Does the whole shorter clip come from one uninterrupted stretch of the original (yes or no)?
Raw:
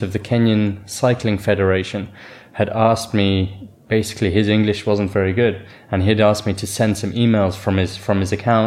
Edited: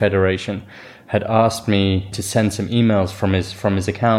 no